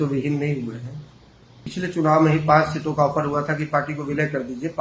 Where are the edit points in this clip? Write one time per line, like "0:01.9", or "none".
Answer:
0:01.7